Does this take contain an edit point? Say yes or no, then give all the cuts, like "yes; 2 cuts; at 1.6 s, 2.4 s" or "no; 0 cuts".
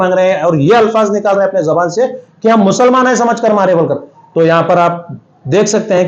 no; 0 cuts